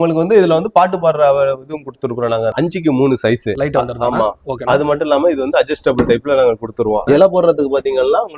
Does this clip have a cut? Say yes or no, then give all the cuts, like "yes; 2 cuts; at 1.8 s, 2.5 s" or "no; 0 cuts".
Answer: yes; 3 cuts; at 2.5 s, 3.5 s, 7.0 s